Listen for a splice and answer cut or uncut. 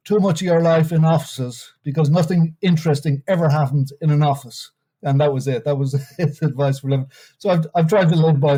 uncut